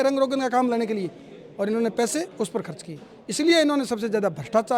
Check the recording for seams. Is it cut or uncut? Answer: uncut